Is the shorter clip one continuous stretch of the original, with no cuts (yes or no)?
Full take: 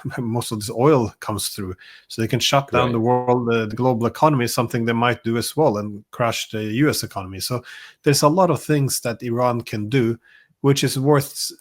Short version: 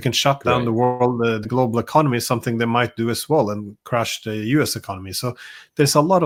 yes